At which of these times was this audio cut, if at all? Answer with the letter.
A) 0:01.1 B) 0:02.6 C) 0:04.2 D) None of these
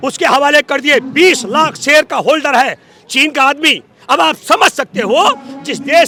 D